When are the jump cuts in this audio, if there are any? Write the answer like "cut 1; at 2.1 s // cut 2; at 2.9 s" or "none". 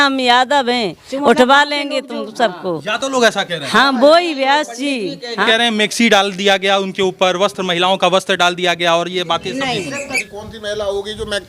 cut 1; at 5.4 s // cut 2; at 10.0 s